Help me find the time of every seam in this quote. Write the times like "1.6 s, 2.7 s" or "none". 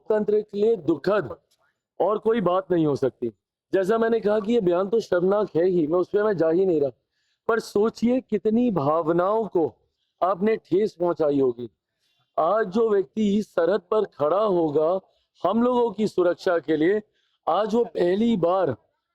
none